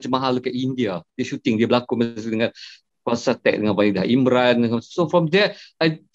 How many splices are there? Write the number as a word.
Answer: one